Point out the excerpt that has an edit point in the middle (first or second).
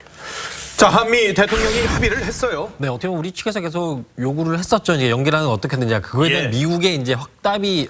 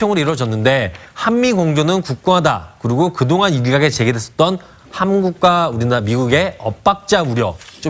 second